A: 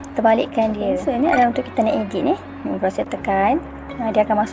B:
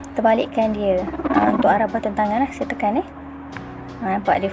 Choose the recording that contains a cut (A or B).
A